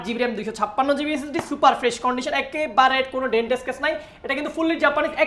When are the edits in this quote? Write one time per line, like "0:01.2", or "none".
none